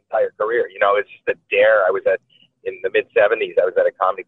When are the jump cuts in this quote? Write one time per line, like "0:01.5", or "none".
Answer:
none